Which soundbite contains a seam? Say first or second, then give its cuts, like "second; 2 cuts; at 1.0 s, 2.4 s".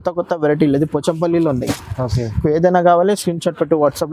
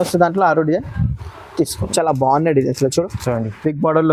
second; 1 cut; at 1.9 s